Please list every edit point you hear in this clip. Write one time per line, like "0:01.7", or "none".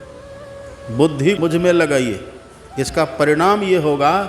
0:01.3

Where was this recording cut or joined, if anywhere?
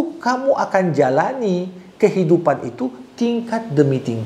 none

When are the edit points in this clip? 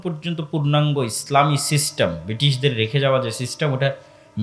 none

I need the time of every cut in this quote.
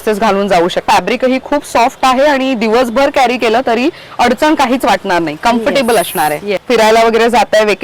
0:00.8
0:06.5

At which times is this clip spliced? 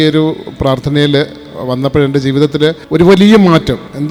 none

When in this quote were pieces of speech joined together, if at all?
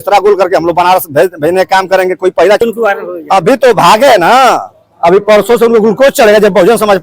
0:02.6

